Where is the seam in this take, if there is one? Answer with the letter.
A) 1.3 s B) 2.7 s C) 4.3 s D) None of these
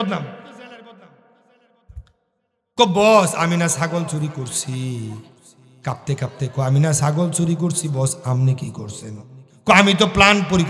D